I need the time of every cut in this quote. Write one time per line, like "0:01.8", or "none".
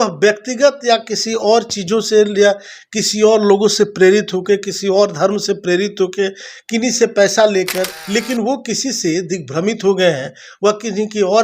0:08.0